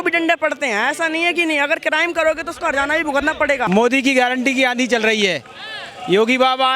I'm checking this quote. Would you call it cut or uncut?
cut